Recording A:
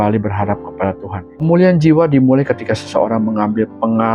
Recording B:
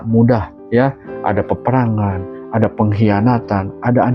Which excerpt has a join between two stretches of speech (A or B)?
A